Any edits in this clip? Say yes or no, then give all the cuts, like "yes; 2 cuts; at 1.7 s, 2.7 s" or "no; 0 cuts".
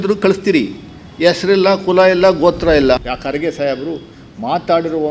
yes; 1 cut; at 3.0 s